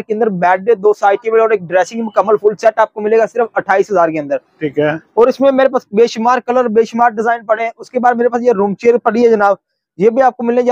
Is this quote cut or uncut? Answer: uncut